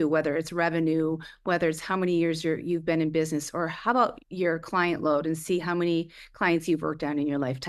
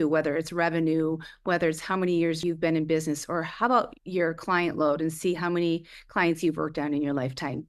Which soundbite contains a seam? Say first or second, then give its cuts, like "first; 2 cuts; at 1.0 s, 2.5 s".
second; 1 cut; at 2.4 s